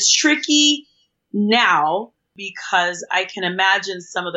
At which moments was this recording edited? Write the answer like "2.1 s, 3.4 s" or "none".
2.2 s